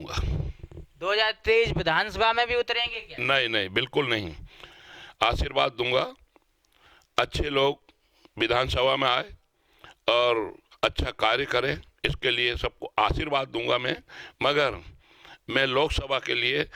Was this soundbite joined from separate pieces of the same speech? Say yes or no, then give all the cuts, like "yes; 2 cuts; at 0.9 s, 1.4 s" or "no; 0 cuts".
no; 0 cuts